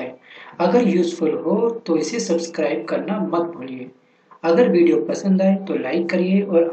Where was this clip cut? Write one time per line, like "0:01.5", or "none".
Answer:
0:01.8